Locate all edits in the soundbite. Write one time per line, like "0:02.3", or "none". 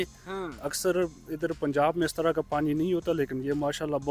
none